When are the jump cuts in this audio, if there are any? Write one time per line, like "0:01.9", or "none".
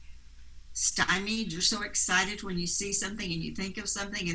none